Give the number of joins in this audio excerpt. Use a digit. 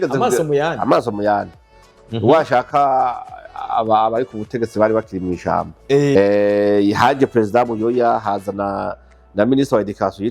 1